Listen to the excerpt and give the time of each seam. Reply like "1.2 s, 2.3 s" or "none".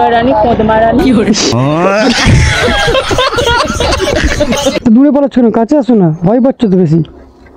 none